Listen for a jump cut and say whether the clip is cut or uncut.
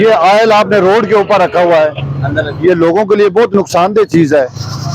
uncut